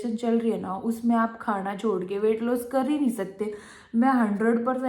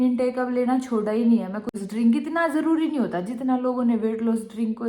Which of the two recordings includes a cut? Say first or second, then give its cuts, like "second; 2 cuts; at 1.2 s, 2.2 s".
second; 1 cut; at 1.7 s